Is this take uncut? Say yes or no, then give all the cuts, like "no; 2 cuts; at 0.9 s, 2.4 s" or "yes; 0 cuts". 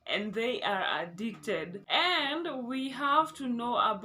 no; 1 cut; at 1.8 s